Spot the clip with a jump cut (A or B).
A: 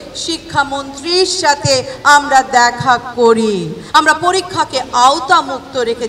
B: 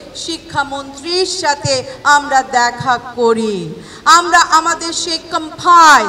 A